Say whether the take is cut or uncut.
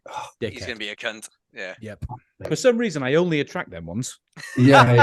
cut